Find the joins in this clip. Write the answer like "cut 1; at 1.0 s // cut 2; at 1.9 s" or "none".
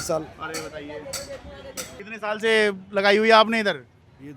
cut 1; at 2.0 s